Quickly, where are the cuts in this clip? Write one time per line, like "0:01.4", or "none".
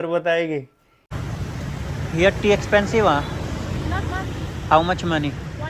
0:01.1